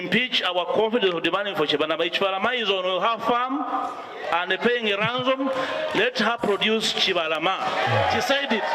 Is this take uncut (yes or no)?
yes